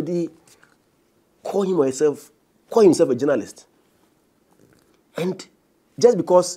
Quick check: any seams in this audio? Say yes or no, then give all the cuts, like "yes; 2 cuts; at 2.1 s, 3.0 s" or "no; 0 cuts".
no; 0 cuts